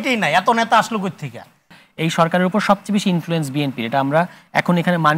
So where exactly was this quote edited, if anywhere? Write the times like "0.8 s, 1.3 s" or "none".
1.7 s

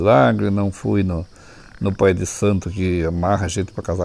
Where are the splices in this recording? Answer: none

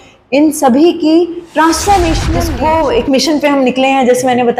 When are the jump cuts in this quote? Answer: 2.3 s

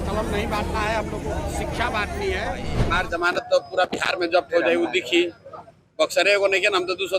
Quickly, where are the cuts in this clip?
2.7 s

